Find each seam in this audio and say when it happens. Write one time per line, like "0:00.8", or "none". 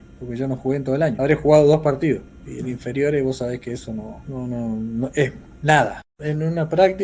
0:01.2
0:04.2
0:06.2